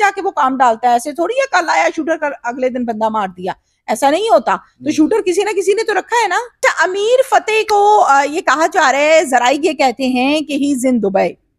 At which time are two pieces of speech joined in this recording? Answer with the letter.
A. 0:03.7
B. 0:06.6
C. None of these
B